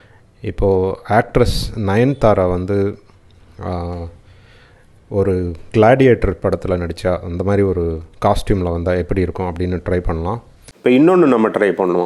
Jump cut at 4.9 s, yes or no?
no